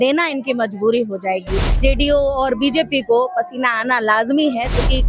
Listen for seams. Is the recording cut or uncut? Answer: cut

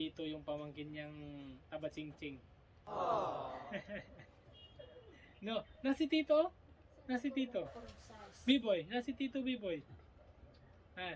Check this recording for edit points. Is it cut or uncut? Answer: uncut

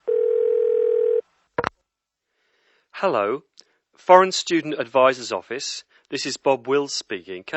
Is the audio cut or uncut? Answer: cut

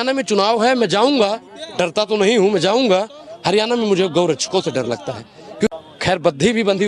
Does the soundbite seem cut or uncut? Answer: uncut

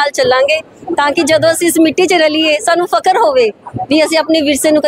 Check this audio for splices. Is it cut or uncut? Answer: uncut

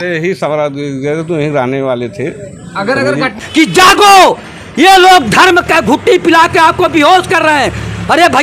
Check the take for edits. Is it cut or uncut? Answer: cut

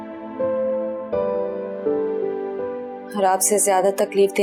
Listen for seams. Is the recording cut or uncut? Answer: uncut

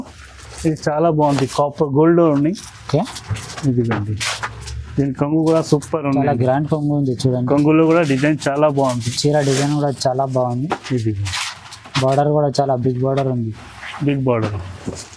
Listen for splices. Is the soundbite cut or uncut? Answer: uncut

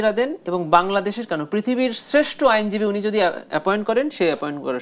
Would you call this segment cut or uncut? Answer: uncut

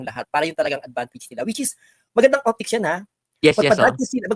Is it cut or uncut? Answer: uncut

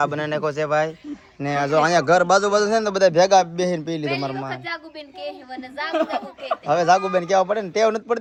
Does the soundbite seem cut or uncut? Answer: uncut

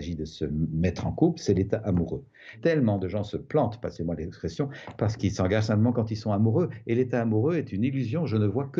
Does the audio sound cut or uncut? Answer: cut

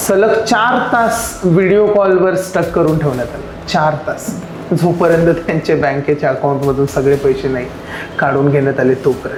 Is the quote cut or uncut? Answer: uncut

